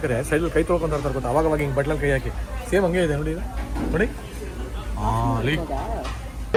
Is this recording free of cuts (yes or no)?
yes